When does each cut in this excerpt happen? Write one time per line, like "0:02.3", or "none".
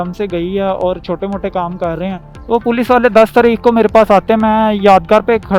0:02.3